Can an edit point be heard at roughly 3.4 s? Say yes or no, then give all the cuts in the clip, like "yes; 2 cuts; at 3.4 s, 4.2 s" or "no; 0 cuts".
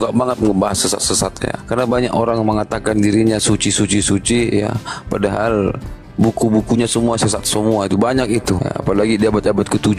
no; 2 cuts; at 1.5 s, 8.6 s